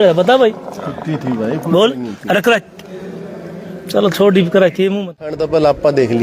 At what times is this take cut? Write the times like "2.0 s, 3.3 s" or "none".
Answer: 5.3 s